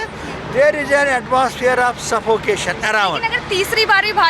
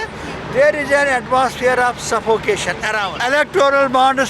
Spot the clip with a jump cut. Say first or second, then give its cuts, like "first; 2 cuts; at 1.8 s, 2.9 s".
second; 1 cut; at 3.1 s